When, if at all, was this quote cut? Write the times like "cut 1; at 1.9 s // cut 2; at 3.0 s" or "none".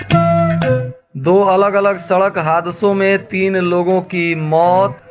cut 1; at 1.0 s